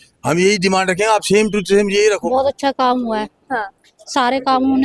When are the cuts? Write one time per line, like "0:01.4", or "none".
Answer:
0:02.2